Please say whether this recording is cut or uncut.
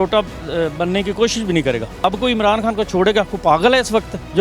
uncut